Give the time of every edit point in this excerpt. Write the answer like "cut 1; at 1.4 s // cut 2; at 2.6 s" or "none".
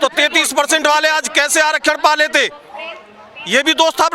none